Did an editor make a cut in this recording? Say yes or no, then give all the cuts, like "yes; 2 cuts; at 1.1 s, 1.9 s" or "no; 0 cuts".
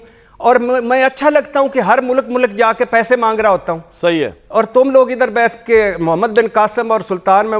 no; 0 cuts